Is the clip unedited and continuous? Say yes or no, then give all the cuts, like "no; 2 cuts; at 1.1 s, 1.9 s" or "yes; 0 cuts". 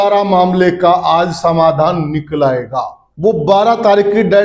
no; 1 cut; at 3.0 s